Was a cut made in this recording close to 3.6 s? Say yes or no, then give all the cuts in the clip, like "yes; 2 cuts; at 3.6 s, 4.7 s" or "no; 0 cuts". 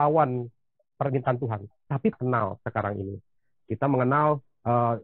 no; 1 cut; at 2.1 s